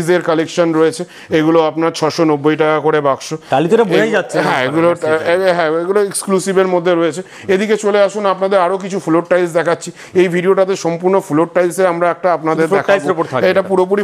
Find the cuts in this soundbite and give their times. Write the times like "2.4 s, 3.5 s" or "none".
none